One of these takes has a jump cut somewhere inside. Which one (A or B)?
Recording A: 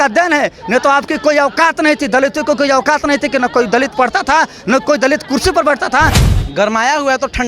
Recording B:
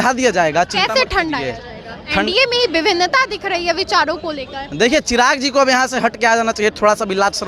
A